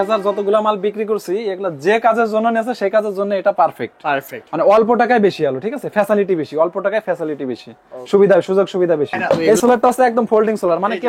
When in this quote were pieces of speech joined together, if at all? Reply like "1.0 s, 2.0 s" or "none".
9.4 s